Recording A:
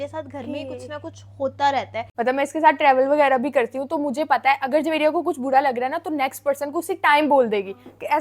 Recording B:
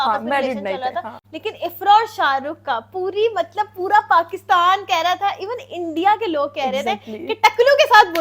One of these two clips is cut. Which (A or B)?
A